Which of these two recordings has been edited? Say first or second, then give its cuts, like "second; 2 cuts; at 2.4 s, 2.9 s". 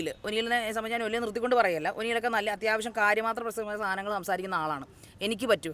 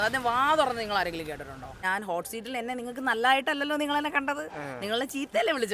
second; 1 cut; at 1.8 s